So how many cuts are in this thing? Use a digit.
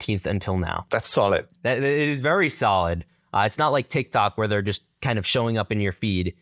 1